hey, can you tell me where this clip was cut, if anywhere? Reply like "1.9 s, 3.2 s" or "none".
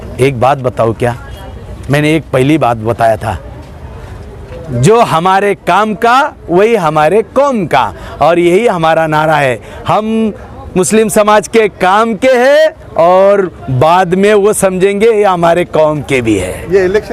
none